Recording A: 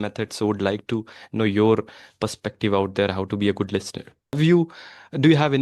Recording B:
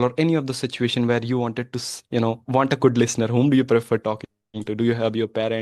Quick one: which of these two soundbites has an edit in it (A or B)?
A